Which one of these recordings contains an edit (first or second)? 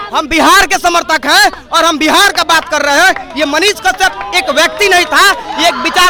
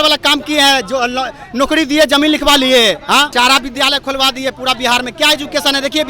second